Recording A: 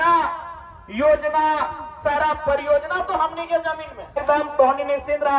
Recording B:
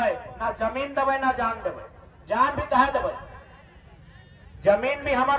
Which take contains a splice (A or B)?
A